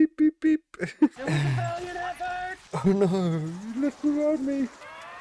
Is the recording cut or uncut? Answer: cut